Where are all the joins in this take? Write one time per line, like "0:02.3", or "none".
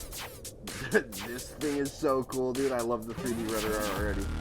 none